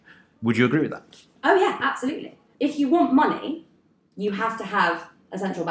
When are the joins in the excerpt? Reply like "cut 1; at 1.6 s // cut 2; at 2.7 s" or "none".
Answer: cut 1; at 2.4 s

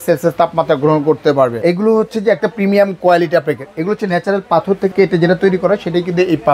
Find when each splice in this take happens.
cut 1; at 1.5 s // cut 2; at 4.9 s

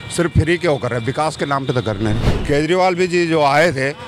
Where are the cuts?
cut 1; at 2.3 s

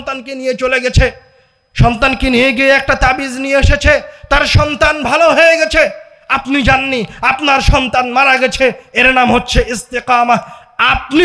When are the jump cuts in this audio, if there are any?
none

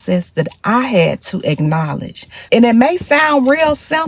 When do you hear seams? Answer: cut 1; at 2.4 s

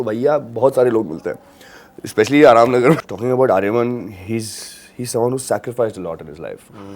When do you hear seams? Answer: cut 1; at 3.0 s

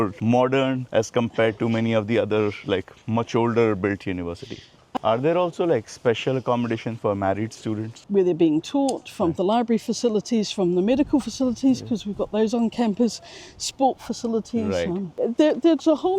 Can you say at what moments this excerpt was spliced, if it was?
cut 1; at 4.9 s // cut 2; at 8.0 s // cut 3; at 15.2 s

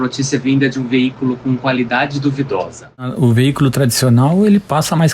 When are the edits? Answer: cut 1; at 3.1 s

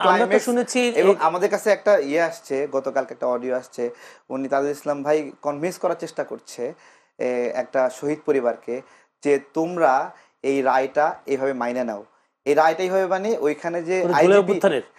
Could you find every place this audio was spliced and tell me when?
none

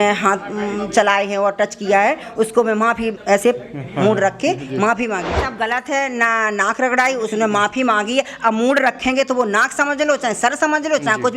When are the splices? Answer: cut 1; at 5.4 s

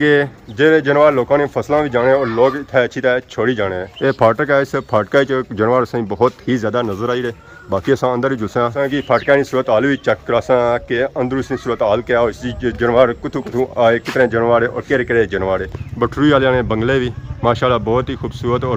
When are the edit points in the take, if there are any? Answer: none

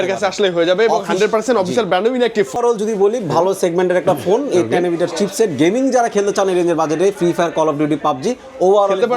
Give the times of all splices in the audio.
cut 1; at 2.6 s

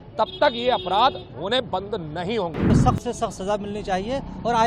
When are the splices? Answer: cut 1; at 2.6 s

